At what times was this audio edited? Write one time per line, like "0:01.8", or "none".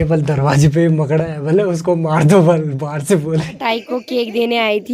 0:03.6